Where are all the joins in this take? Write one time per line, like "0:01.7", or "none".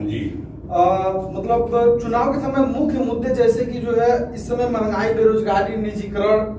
none